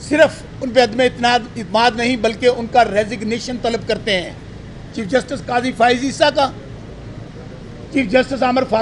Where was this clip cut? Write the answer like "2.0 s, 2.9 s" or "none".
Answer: none